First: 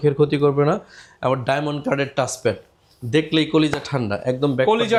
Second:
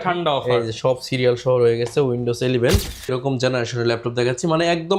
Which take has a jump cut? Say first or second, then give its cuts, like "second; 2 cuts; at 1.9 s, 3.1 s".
second; 1 cut; at 3.1 s